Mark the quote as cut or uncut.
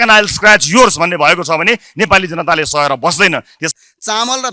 cut